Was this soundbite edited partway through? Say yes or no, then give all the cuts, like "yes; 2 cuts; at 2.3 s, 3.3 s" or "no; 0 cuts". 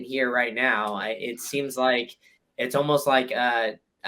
no; 0 cuts